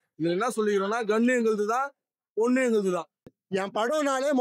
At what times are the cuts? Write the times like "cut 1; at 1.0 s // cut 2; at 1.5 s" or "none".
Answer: cut 1; at 3.4 s